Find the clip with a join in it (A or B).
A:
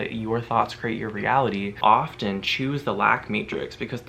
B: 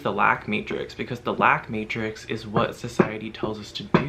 A